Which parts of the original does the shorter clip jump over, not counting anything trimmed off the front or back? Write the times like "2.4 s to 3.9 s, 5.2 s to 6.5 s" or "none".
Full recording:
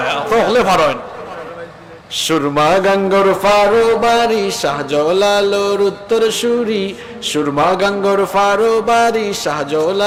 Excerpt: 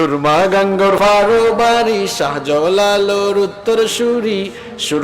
3.3 s to 3.4 s